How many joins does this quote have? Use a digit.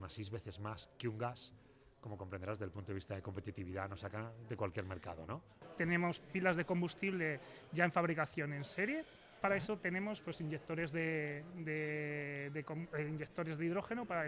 2